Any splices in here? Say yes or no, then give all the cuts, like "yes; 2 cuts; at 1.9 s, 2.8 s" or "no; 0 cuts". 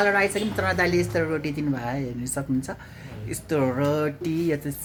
no; 0 cuts